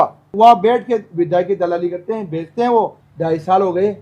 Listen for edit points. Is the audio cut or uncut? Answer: cut